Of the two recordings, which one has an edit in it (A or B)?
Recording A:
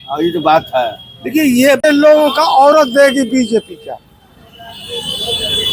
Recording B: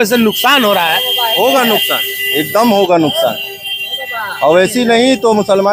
A